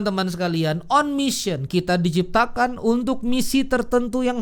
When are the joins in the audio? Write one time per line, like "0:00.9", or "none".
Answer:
none